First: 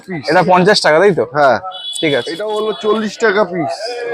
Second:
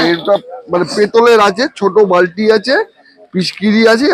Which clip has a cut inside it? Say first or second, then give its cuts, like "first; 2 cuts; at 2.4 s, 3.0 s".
first; 1 cut; at 2.6 s